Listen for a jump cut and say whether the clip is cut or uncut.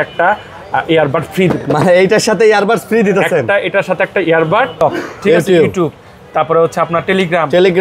cut